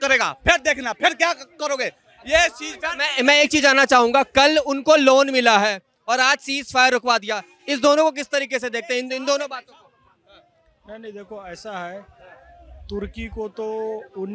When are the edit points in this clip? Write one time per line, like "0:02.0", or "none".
none

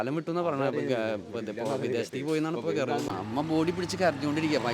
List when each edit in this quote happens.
0:03.1

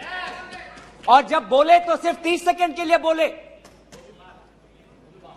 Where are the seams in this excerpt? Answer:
none

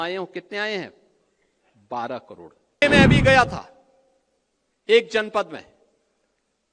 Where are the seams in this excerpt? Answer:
0:02.8

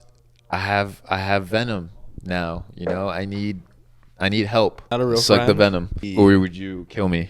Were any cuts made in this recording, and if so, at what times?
0:04.9
0:06.1

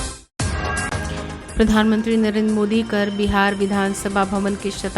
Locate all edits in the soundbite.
0:00.9

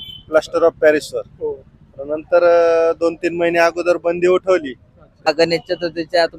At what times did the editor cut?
0:05.3

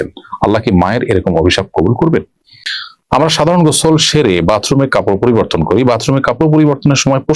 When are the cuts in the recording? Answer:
0:02.9

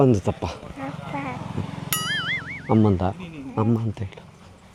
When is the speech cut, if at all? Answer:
none

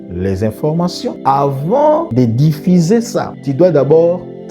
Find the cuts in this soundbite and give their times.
0:01.2
0:02.1
0:03.3

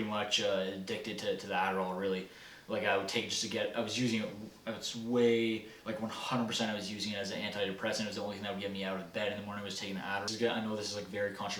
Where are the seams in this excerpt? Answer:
0:10.3

